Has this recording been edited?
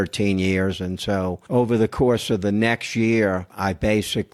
yes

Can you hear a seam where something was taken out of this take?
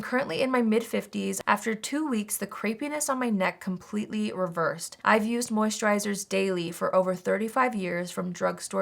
yes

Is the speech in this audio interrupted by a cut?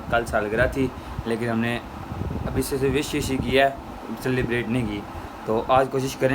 no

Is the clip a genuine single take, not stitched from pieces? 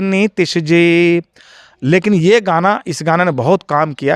yes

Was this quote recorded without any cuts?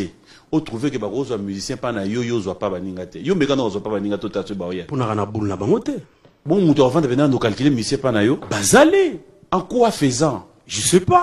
yes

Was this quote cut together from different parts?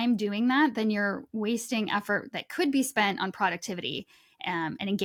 no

